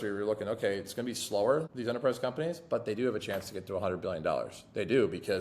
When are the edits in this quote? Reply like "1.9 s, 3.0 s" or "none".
1.7 s

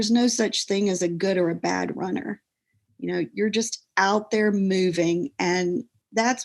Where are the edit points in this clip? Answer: none

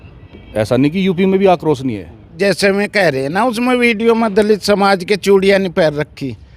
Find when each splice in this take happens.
2.3 s

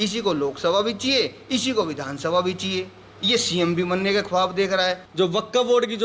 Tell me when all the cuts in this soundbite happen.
5.0 s

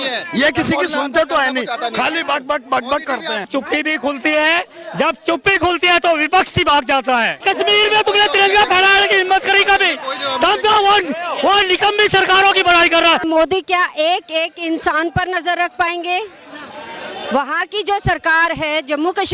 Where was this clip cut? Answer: 3.4 s, 7.4 s, 13.2 s

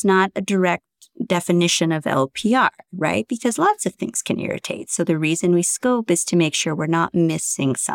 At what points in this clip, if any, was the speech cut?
none

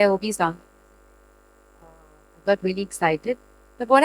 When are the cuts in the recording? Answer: none

